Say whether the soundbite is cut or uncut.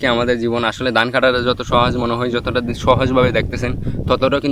uncut